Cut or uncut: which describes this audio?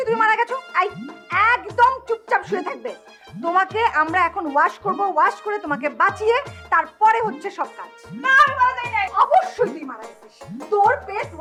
uncut